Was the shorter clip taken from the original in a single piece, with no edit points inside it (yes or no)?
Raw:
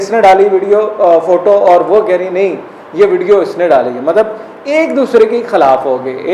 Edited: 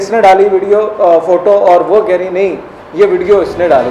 yes